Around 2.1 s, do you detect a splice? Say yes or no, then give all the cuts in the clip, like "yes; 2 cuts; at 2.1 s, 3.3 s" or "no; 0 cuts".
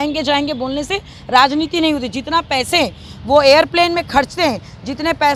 no; 0 cuts